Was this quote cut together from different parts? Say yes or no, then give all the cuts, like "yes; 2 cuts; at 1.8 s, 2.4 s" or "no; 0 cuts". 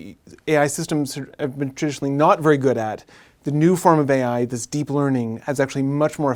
no; 0 cuts